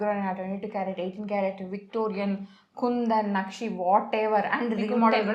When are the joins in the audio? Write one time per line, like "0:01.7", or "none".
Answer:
none